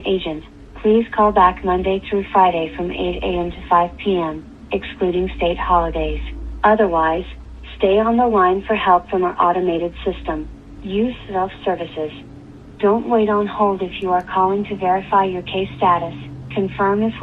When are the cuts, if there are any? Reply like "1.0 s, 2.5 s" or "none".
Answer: 4.4 s